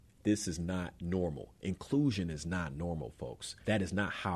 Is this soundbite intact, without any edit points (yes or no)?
no